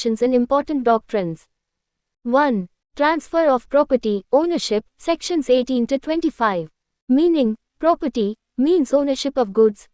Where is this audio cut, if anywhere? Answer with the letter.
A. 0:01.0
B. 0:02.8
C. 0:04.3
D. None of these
B